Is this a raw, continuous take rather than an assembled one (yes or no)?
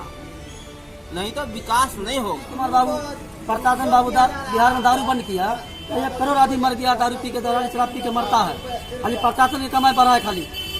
no